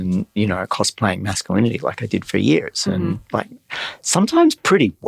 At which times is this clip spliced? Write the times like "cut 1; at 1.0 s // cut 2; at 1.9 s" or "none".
none